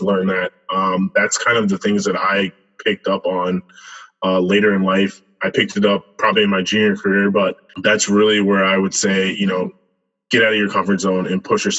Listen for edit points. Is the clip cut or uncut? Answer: cut